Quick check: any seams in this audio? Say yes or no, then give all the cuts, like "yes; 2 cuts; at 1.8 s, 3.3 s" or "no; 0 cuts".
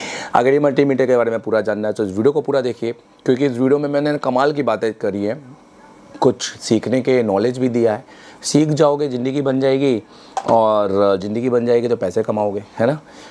no; 0 cuts